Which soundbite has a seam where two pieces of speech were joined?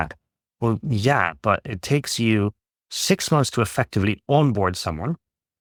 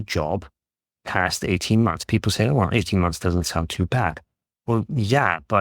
second; 1 cut; at 2.0 s

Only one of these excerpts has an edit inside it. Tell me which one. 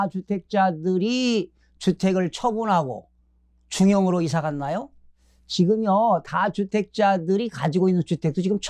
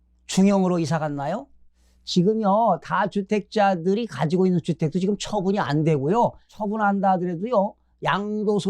second; 1 cut; at 6.5 s

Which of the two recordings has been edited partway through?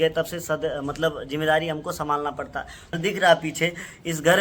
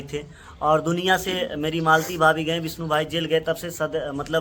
first; 1 cut; at 3.0 s

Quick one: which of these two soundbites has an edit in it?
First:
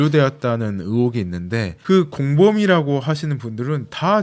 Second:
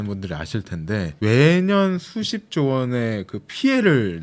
second; 1 cut; at 1.1 s

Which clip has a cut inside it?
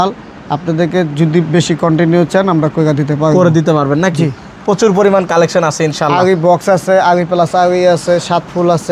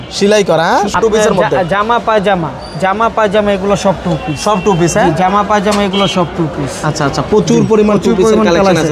second; 1 cut; at 0.9 s

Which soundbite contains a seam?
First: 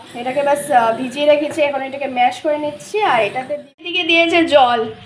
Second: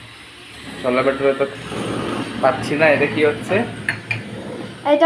first; 1 cut; at 3.4 s

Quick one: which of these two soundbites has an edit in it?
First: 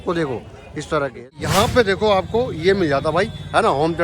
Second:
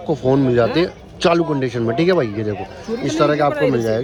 first; 1 cut; at 1.2 s

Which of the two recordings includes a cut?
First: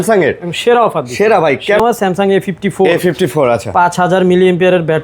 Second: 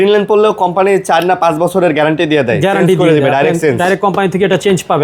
first; 1 cut; at 1.8 s

